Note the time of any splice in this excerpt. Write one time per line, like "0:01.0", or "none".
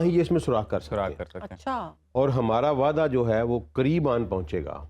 0:02.0